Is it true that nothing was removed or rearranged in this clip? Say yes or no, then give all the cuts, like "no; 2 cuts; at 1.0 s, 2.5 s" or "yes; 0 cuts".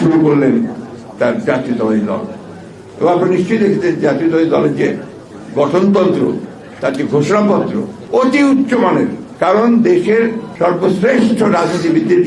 no; 3 cuts; at 7.9 s, 9.2 s, 10.4 s